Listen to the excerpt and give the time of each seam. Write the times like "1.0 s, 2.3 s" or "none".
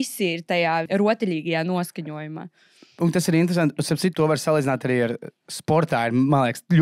0.9 s, 4.1 s